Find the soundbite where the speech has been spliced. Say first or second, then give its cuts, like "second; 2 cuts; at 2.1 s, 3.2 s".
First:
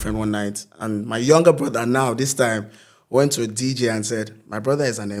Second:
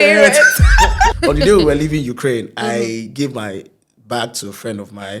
second; 1 cut; at 1.2 s